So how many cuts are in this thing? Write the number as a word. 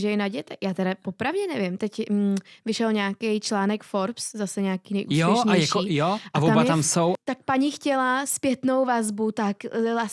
one